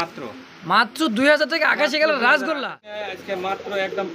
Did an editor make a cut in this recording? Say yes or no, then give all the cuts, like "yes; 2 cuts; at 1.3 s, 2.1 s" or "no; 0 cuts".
yes; 1 cut; at 3.1 s